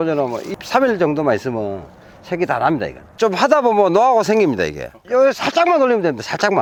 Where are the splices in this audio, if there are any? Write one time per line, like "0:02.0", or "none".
none